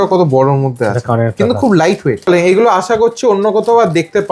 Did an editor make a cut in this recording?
yes; 1 cut; at 2.2 s

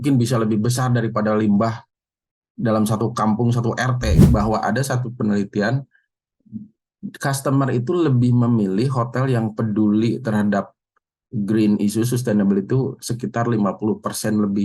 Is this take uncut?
no; 1 cut; at 4.2 s

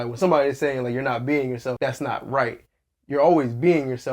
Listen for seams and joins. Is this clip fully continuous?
no; 1 cut; at 1.8 s

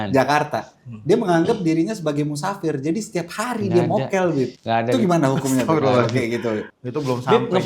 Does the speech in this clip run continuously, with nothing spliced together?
no; 2 cuts; at 4.6 s, 6.7 s

